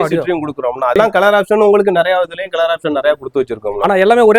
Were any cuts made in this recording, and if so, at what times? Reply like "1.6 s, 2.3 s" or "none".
0.9 s